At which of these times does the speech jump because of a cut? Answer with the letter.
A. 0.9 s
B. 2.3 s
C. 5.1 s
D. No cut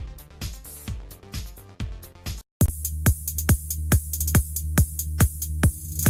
D